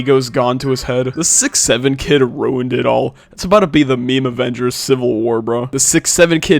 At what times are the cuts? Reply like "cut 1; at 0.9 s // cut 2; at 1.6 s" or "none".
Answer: cut 1; at 1.1 s // cut 2; at 5.7 s